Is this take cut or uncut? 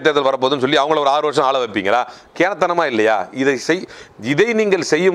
uncut